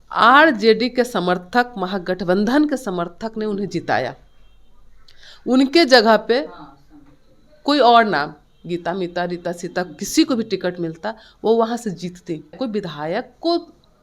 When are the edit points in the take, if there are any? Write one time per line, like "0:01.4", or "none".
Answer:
0:12.5